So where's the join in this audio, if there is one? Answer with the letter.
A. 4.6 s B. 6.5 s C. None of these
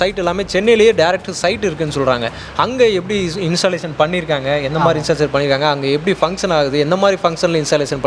C